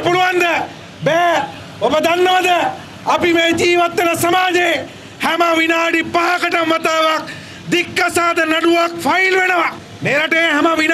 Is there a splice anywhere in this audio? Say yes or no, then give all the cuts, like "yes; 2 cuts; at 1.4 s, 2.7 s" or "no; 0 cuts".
no; 0 cuts